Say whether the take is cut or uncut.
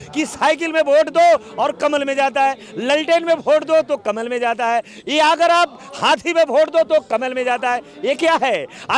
uncut